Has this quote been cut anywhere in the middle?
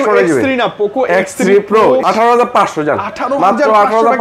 yes; 1 cut; at 2.0 s

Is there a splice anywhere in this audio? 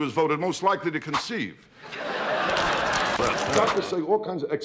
yes; 1 cut; at 3.4 s

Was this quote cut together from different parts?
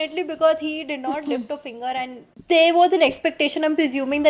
yes; 1 cut; at 2.3 s

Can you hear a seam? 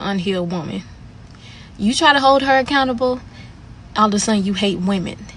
no; 0 cuts

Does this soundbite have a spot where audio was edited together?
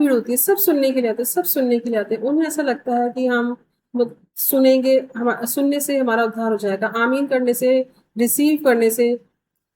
no; 0 cuts

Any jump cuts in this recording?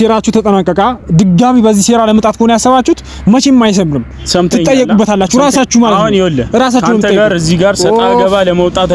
no; 0 cuts

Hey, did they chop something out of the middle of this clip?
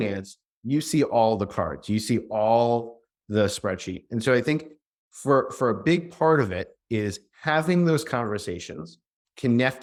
no; 0 cuts

